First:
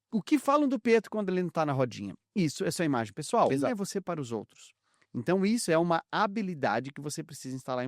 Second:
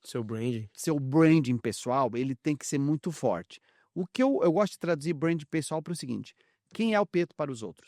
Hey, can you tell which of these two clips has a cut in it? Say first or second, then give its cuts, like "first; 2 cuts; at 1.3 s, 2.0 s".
first; 1 cut; at 3.7 s